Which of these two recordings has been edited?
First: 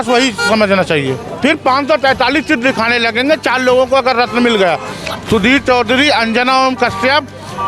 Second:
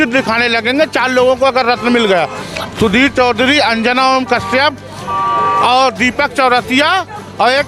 first; 1 cut; at 1.2 s

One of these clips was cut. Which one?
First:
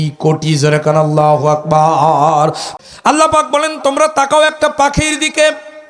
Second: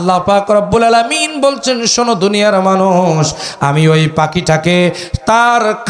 first; 1 cut; at 2.7 s

